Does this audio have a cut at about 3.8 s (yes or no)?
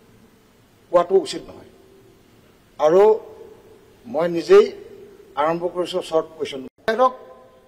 no